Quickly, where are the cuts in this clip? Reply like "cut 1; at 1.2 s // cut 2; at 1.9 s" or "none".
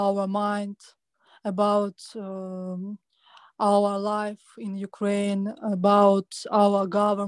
none